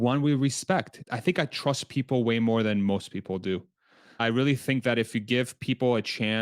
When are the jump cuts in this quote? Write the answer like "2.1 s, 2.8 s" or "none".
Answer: 1.0 s, 4.2 s